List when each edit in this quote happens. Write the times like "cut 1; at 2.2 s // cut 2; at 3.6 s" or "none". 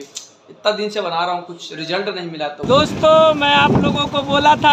cut 1; at 2.6 s